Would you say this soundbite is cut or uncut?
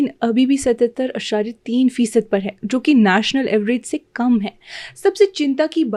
uncut